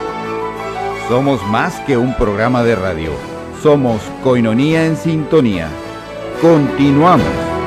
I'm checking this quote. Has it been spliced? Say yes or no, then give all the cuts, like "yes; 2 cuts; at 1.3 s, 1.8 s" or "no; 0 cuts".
no; 0 cuts